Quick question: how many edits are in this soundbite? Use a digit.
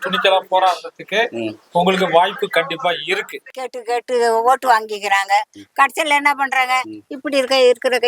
1